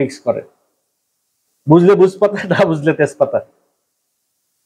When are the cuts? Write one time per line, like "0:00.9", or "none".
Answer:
0:01.5